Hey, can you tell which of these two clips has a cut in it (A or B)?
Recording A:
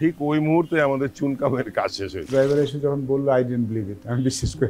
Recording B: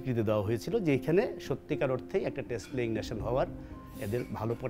A